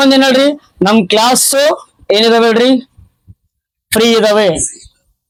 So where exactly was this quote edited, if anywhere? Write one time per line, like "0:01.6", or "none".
none